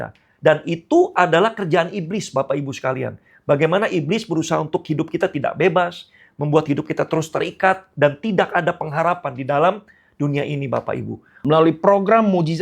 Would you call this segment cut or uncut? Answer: cut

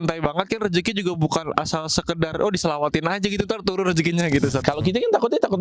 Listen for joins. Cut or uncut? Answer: cut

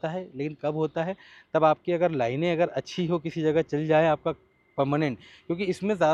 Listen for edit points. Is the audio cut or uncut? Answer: uncut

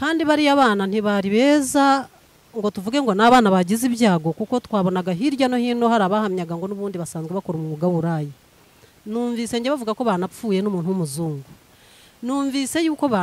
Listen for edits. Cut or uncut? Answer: uncut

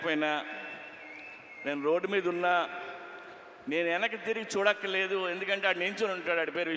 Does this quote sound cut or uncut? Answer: uncut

